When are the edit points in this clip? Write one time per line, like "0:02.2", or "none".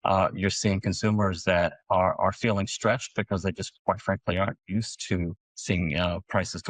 0:05.5